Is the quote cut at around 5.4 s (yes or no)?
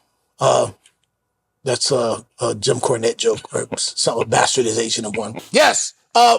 yes